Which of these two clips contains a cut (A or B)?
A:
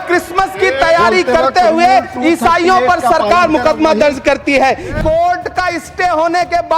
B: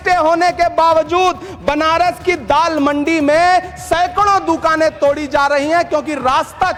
A